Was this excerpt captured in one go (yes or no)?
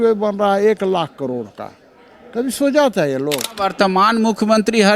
no